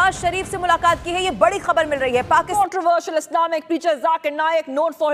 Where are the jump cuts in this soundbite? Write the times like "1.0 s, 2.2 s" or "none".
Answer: 2.5 s